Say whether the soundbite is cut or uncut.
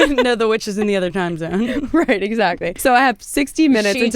cut